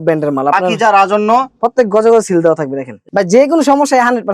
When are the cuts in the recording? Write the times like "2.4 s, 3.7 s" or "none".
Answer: 3.0 s